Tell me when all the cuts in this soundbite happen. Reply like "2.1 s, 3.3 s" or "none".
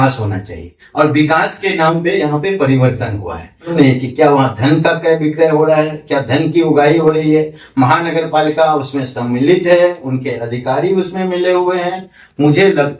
3.7 s